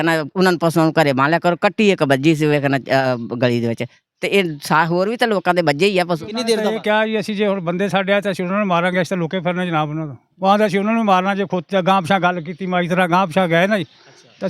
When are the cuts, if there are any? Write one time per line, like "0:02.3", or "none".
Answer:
0:06.7